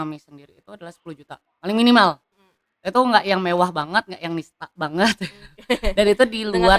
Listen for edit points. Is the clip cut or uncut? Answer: uncut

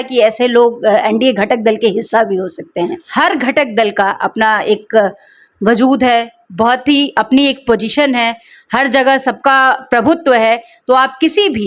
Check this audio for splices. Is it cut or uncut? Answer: cut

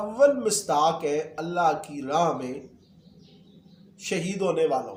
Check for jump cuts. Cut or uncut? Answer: uncut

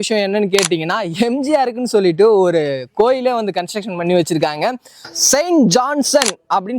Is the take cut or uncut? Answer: cut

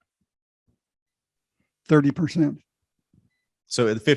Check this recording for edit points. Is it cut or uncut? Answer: uncut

